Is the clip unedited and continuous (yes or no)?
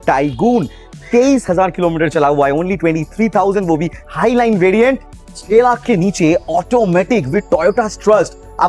no